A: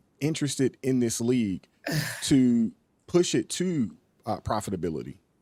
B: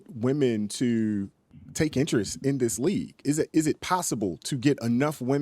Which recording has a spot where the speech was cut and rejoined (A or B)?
B